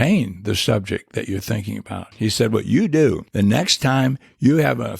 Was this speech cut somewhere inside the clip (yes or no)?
yes